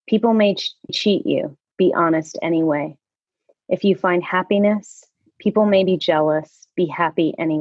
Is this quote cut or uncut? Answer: cut